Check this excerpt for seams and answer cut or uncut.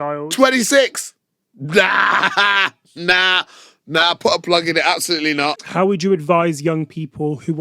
cut